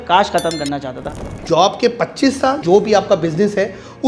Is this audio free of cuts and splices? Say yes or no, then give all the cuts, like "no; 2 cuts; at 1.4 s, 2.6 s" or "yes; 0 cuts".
no; 2 cuts; at 1.3 s, 2.6 s